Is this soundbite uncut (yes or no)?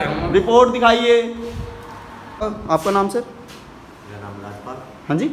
no